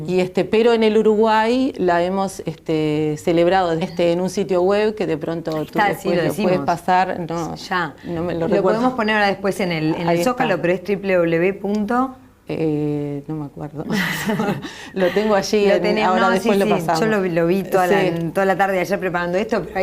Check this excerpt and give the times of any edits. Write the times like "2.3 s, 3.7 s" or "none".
none